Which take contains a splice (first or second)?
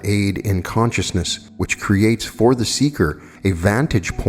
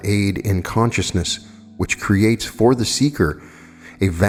first